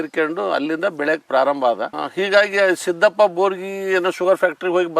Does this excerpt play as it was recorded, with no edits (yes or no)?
no